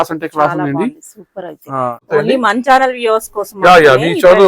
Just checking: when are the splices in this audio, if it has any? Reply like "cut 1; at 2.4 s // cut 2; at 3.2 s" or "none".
cut 1; at 2.1 s